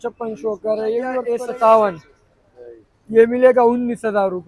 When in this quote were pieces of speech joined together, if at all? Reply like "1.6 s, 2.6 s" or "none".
1.1 s